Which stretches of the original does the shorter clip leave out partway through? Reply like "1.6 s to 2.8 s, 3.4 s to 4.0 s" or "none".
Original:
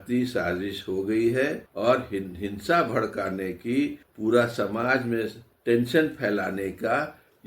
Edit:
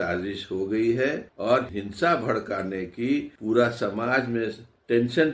2.0 s to 2.3 s, 4.0 s to 4.1 s